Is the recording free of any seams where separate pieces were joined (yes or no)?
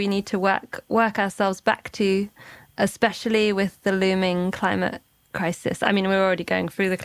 yes